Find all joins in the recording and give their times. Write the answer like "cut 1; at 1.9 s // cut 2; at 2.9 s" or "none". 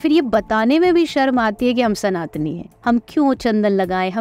cut 1; at 2.7 s